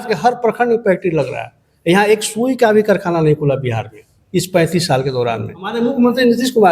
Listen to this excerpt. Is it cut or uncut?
cut